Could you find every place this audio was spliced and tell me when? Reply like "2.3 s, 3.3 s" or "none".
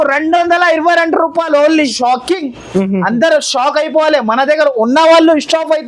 1.8 s

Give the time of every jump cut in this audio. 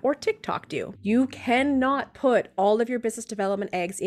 0.9 s

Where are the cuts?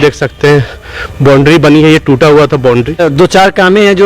3.0 s

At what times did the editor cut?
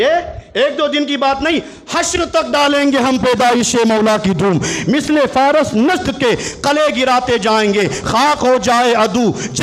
none

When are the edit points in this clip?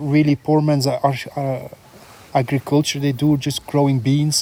none

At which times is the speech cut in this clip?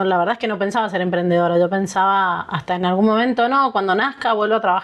none

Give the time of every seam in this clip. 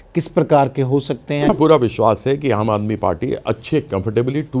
1.4 s

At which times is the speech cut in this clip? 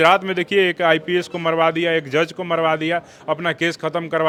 none

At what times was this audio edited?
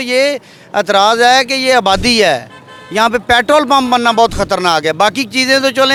none

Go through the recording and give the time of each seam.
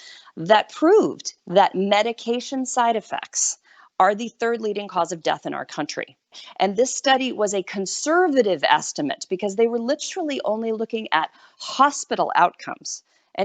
6.3 s

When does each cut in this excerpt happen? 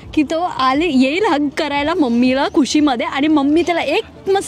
none

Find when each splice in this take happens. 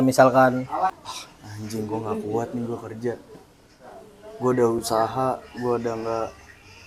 1.0 s

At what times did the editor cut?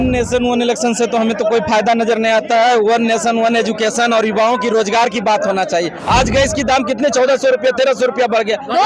6.0 s

